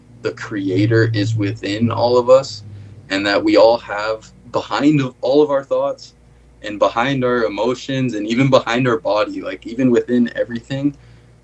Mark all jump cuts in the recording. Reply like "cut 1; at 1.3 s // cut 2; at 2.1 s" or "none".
none